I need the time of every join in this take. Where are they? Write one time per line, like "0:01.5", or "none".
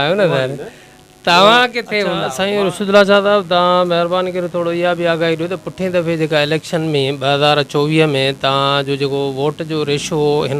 0:02.3